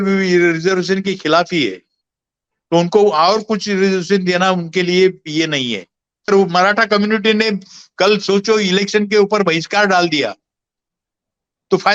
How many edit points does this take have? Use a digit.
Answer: 1